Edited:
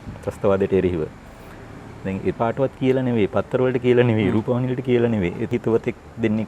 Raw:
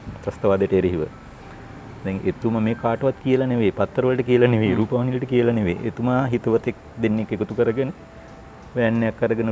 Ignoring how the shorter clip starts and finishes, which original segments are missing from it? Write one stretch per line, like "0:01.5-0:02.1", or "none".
0:02.4-0:02.8
0:05.9-0:06.3